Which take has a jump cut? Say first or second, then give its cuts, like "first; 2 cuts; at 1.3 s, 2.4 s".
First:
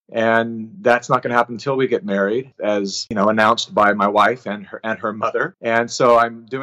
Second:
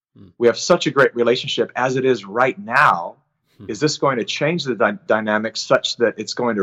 first; 2 cuts; at 2.6 s, 5.5 s